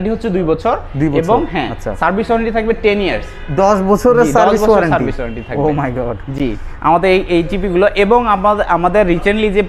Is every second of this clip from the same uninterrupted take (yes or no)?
yes